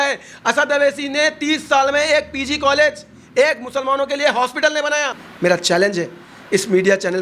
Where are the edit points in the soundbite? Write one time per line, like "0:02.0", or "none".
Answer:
0:05.2